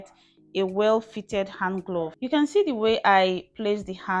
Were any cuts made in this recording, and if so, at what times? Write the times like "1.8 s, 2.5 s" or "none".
2.2 s